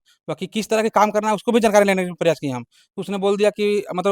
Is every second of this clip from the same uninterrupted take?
yes; 0 cuts

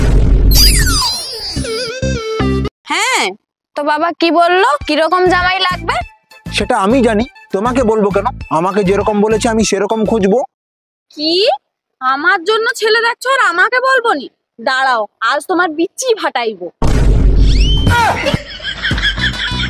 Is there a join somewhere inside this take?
yes; 1 cut; at 2.7 s

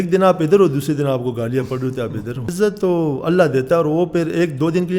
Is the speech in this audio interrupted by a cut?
yes; 1 cut; at 2.5 s

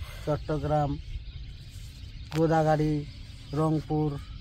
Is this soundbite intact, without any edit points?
yes; 0 cuts

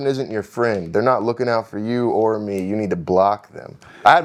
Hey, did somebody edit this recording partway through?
no; 0 cuts

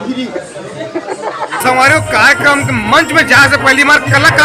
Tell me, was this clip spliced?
yes; 1 cut; at 1.6 s

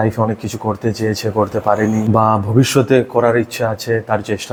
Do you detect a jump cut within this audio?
no; 0 cuts

